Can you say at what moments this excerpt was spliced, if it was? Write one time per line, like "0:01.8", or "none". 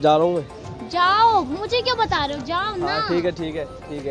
none